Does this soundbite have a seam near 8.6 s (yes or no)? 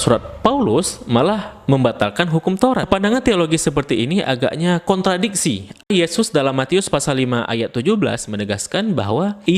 no